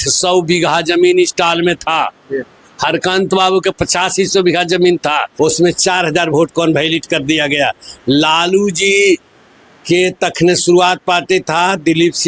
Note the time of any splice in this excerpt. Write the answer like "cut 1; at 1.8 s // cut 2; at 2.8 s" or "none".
cut 1; at 5.3 s